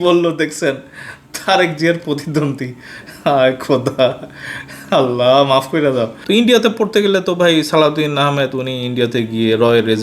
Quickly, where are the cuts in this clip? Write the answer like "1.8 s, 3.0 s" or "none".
6.2 s